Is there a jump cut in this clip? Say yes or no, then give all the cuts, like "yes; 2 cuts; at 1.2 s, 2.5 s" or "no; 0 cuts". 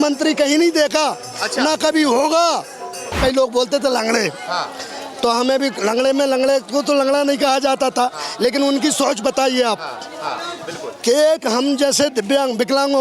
yes; 1 cut; at 3.2 s